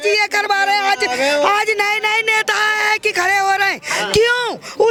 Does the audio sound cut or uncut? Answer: uncut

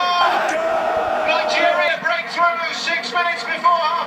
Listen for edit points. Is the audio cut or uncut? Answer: uncut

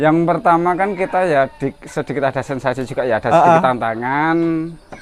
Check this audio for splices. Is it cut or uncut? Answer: uncut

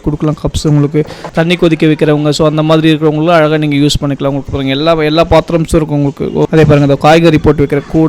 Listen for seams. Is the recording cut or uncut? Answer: cut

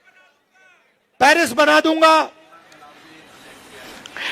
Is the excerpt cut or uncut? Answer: cut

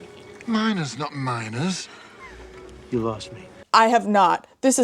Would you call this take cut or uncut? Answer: uncut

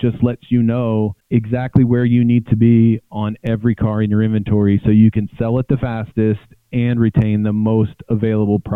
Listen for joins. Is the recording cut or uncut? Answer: uncut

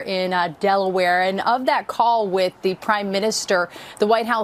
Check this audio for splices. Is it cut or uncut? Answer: uncut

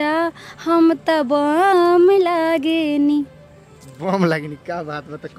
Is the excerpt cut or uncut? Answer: uncut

